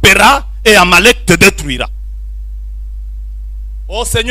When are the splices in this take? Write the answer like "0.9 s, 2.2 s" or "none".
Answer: none